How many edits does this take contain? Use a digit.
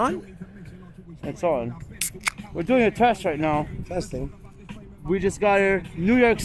0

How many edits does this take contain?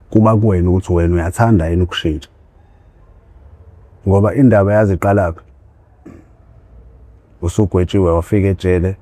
0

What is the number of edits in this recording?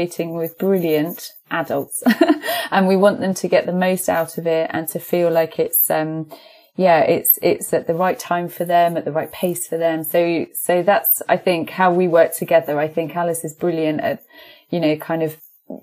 0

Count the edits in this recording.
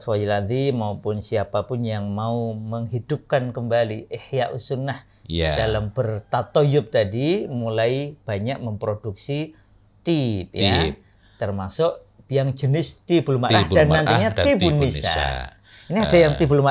0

